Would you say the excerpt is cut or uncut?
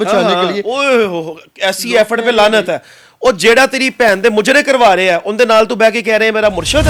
uncut